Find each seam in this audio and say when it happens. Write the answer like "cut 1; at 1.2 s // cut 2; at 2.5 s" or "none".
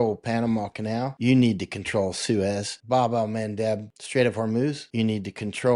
cut 1; at 1.1 s // cut 2; at 2.7 s // cut 3; at 4.0 s // cut 4; at 4.8 s